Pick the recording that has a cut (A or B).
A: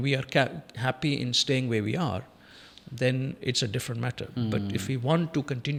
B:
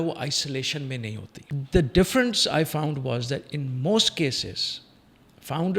B